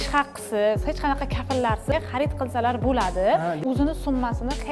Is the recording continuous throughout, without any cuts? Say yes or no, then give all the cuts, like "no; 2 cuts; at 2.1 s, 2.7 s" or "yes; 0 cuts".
no; 2 cuts; at 1.9 s, 3.6 s